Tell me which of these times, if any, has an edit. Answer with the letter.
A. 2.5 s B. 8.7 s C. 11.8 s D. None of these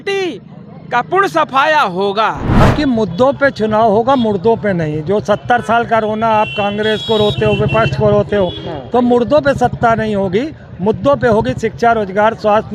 A